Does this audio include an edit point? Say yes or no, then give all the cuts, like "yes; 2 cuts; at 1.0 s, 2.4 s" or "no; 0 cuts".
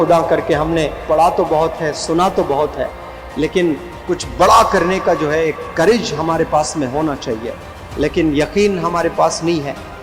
no; 0 cuts